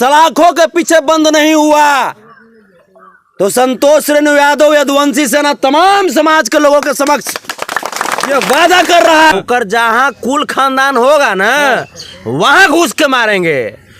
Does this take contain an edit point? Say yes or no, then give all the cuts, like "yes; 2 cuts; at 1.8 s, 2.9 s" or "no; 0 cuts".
yes; 1 cut; at 9.3 s